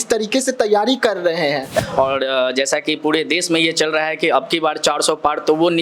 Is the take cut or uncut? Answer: cut